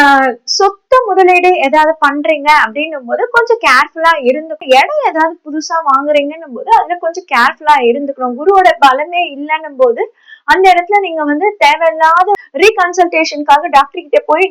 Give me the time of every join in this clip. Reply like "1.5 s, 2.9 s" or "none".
4.6 s, 12.4 s